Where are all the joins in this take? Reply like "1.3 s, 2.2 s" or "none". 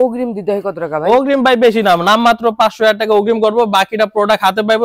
none